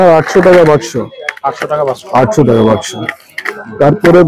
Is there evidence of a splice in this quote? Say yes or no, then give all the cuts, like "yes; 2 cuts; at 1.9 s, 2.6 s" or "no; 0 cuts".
no; 0 cuts